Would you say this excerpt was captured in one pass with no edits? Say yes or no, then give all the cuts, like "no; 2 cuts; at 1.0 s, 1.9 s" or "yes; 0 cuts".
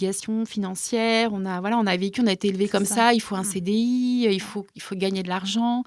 yes; 0 cuts